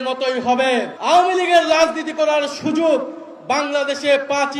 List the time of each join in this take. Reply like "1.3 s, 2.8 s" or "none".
0.9 s

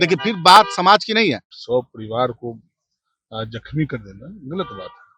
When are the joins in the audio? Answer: 1.5 s

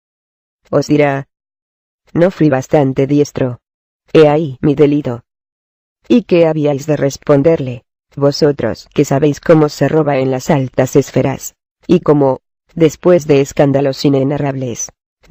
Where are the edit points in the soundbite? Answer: 2.6 s

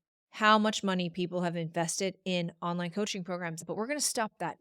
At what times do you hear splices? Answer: 3.6 s

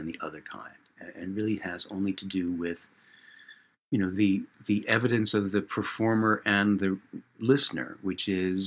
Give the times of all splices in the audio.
none

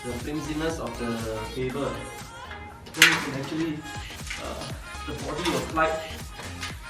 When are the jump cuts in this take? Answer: none

